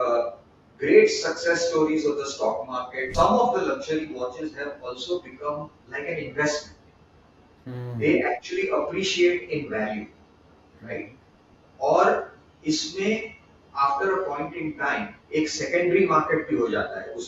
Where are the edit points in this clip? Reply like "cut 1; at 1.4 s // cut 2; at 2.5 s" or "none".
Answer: cut 1; at 3.1 s